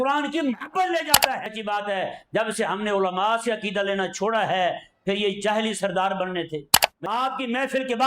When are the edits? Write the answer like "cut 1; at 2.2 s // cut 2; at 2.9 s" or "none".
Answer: cut 1; at 1.4 s // cut 2; at 6.9 s